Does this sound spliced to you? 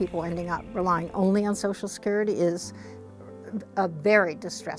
no; 0 cuts

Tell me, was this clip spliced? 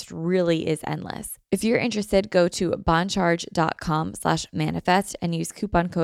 yes; 1 cut; at 1.3 s

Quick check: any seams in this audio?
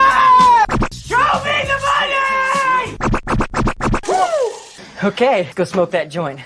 yes; 1 cut; at 5.5 s

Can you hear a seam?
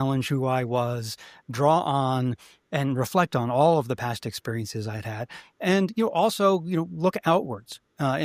no; 0 cuts

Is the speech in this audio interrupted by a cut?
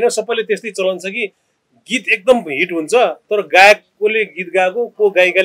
no; 0 cuts

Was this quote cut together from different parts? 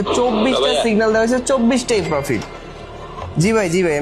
no; 0 cuts

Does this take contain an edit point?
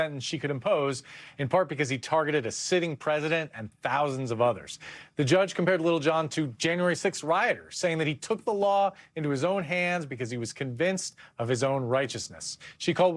yes; 1 cut; at 7.9 s

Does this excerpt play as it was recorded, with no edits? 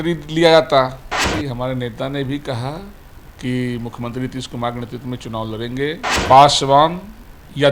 no; 2 cuts; at 1.3 s, 6.1 s

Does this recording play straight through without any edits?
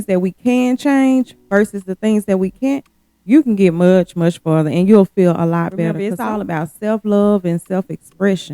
no; 1 cut; at 6.1 s

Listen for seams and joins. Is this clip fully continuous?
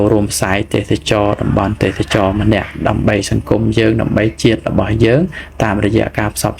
yes; 0 cuts

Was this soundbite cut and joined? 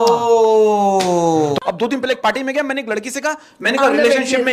yes; 1 cut; at 1.6 s

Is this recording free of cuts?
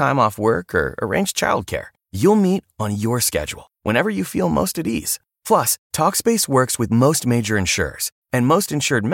yes; 0 cuts

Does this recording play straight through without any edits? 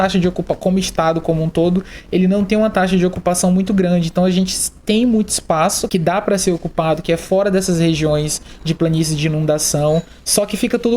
no; 1 cut; at 5.8 s

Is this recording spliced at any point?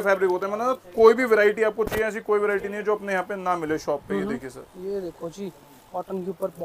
no; 0 cuts

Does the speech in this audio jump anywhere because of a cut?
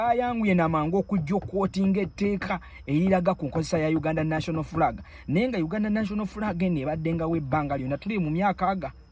no; 0 cuts

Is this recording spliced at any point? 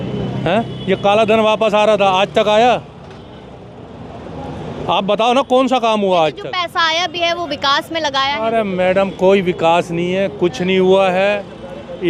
no; 0 cuts

